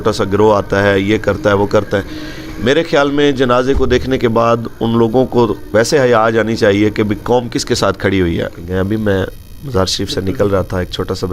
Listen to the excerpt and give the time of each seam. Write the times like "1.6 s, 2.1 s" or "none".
8.6 s

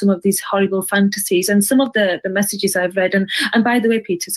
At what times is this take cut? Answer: none

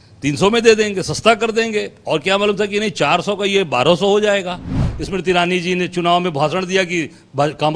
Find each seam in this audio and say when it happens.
4.9 s

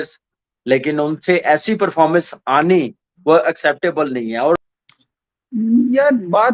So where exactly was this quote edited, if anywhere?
4.6 s

